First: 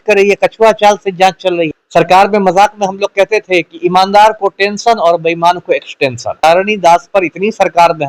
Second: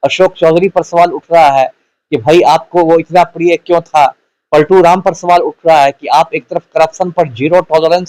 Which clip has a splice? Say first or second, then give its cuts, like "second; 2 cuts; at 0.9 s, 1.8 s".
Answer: first; 2 cuts; at 1.8 s, 6.4 s